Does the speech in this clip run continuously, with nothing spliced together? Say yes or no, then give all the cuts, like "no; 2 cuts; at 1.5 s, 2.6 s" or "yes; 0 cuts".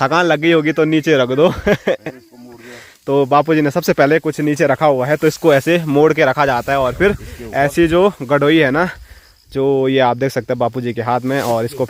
yes; 0 cuts